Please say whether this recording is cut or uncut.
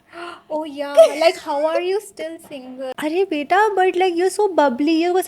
cut